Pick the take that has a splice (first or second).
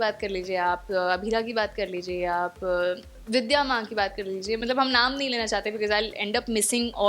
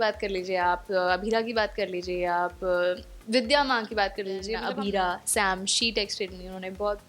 second